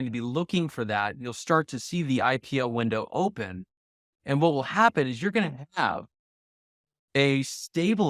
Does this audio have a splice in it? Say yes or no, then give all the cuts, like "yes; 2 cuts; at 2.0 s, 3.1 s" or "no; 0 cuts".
no; 0 cuts